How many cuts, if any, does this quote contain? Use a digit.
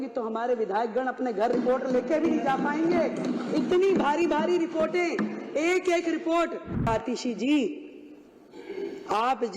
1